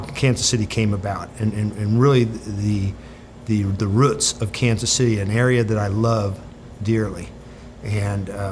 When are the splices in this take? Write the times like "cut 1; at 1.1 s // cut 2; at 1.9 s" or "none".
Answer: none